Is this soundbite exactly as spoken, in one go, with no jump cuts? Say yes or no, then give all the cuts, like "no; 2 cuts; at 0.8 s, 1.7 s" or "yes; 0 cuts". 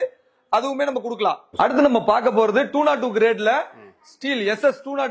yes; 0 cuts